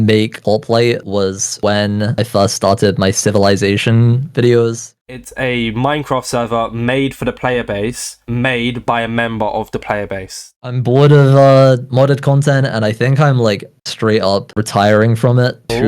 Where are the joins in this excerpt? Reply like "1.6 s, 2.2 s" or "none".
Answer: 4.9 s, 10.6 s